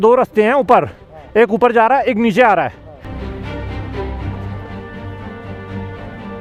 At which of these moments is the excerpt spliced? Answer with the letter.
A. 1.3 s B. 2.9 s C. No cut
C